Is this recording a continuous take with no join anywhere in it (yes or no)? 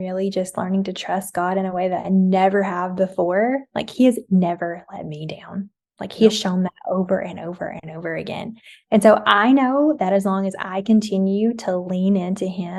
yes